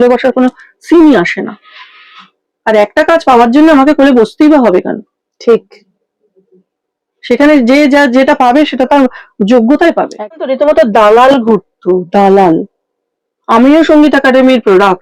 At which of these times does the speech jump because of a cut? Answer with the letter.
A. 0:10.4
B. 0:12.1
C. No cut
A